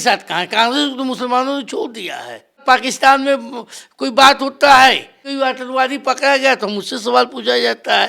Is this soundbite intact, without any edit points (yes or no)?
no